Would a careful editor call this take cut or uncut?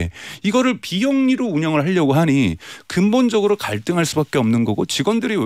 uncut